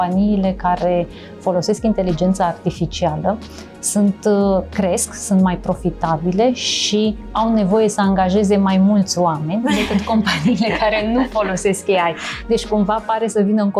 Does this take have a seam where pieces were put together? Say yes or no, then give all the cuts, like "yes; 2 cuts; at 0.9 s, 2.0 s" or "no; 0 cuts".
no; 0 cuts